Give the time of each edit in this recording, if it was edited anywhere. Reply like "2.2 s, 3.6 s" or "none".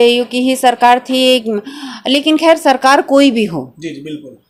none